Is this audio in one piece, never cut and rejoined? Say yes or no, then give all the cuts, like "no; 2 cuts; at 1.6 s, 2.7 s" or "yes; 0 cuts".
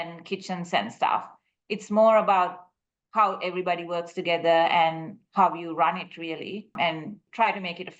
no; 1 cut; at 7.0 s